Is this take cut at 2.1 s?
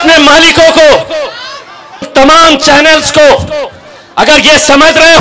yes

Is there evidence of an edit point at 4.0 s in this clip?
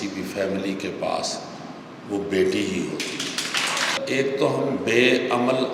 yes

